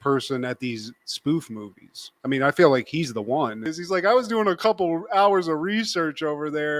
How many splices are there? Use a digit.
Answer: 1